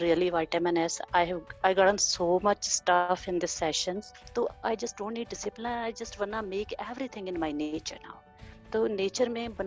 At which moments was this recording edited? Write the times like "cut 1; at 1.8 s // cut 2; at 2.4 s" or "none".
cut 1; at 4.1 s

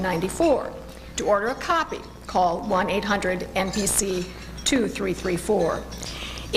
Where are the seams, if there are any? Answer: cut 1; at 2.6 s

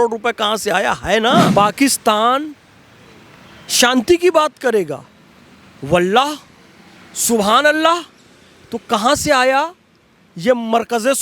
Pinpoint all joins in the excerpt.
cut 1; at 1.5 s

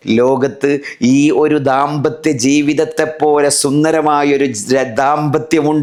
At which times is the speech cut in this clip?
none

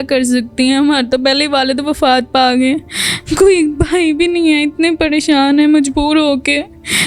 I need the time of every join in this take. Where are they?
none

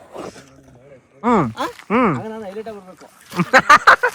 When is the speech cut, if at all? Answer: cut 1; at 1.1 s

